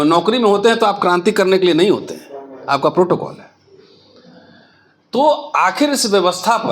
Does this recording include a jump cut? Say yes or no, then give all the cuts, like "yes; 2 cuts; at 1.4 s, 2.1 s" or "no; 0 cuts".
no; 0 cuts